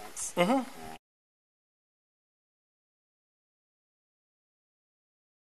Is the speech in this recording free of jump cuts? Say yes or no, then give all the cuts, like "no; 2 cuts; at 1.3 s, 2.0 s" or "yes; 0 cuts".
yes; 0 cuts